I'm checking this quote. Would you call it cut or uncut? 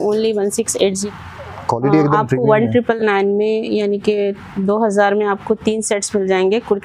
cut